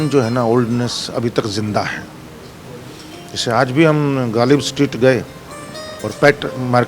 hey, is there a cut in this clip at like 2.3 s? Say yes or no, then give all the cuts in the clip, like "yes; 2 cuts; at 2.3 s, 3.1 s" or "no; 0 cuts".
no; 0 cuts